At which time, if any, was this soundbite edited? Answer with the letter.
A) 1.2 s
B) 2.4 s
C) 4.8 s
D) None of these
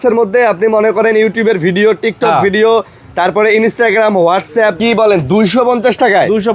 C